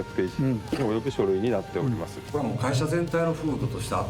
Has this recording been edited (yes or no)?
yes